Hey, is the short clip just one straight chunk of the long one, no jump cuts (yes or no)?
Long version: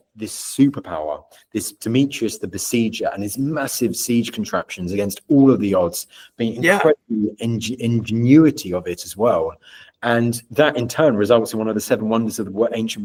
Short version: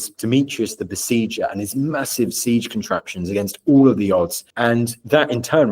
no